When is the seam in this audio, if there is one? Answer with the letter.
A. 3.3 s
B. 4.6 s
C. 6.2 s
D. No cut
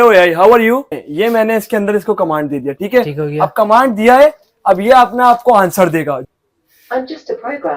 C